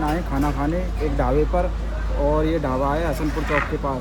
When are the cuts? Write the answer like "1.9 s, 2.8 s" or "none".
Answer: none